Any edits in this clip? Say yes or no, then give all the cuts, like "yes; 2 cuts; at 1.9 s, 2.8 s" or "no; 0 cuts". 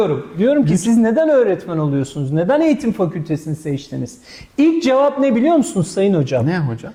no; 0 cuts